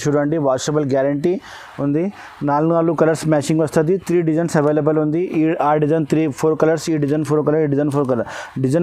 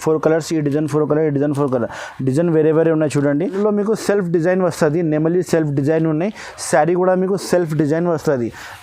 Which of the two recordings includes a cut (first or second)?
second